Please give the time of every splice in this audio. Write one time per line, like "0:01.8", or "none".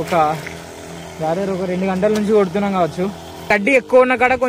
0:03.5